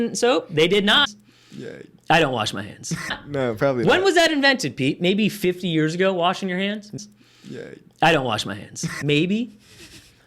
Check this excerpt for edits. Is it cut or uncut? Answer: cut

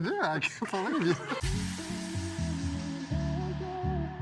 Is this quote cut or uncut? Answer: uncut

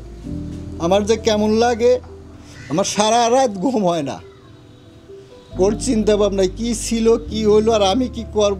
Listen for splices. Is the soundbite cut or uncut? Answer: uncut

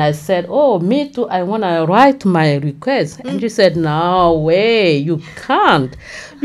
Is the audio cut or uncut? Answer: uncut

